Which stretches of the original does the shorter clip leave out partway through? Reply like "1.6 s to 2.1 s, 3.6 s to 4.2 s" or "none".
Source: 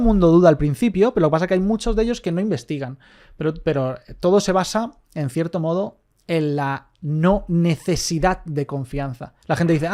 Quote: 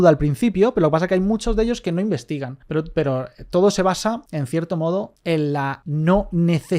2.9 s to 3.2 s, 5.0 s to 5.1 s, 6.3 s to 6.6 s